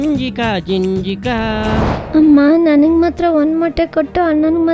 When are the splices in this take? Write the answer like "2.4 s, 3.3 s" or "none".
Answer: 2.0 s